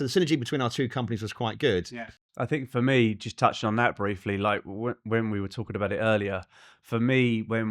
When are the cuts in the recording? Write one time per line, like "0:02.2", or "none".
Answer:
0:01.9